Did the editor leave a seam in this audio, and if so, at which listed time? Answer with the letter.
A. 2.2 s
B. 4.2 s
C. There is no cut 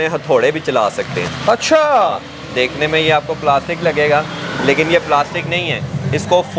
C